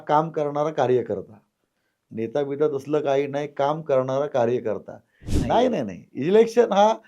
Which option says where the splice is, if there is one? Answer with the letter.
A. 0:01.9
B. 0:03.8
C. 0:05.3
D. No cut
C